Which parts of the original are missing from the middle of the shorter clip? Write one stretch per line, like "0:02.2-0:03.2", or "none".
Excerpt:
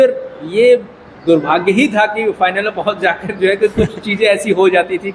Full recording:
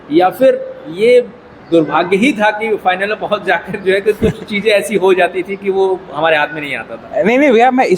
none